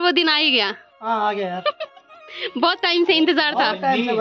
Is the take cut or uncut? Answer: uncut